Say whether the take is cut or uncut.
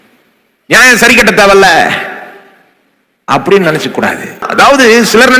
cut